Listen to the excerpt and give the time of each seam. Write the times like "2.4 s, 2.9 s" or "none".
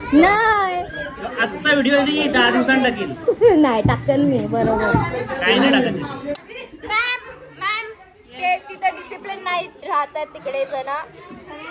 6.3 s